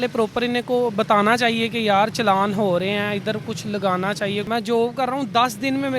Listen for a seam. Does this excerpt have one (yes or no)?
yes